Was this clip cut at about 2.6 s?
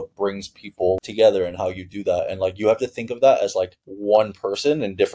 no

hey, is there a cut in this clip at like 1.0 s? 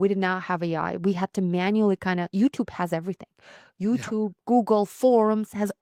no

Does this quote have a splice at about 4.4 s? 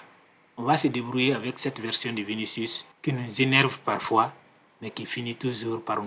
no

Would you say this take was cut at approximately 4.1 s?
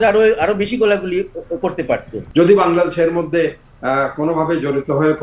no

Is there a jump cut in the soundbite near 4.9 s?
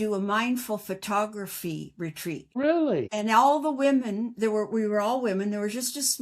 no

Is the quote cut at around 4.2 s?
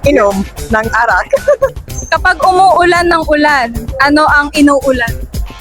no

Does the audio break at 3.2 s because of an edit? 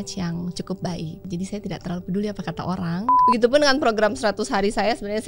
yes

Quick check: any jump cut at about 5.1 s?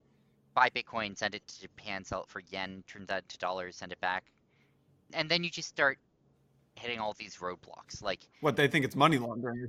yes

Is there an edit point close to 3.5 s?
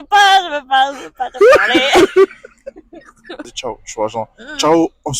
yes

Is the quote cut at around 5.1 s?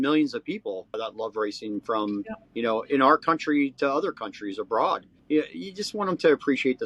yes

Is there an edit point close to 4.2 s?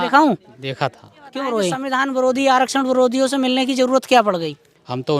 no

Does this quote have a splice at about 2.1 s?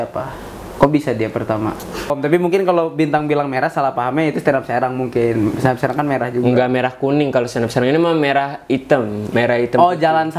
yes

